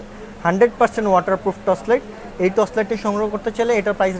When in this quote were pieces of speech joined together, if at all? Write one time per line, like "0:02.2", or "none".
none